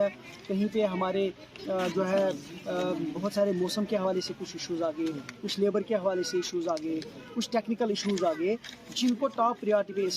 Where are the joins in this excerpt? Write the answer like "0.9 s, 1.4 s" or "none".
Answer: none